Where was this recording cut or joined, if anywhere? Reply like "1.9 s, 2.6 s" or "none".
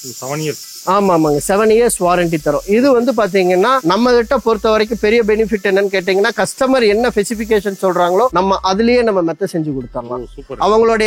3.8 s, 8.3 s